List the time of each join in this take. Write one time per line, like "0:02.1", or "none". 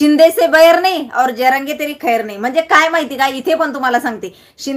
none